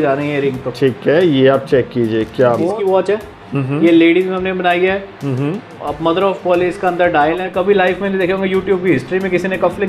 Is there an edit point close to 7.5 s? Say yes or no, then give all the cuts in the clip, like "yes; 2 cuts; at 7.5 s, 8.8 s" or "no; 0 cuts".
yes; 2 cuts; at 2.7 s, 7.5 s